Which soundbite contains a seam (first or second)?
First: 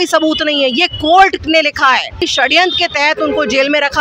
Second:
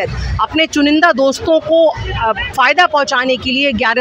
first